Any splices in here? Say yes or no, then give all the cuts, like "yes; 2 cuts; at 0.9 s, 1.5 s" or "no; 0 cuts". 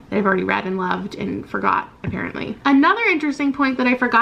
no; 0 cuts